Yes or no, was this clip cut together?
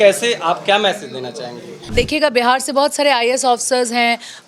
yes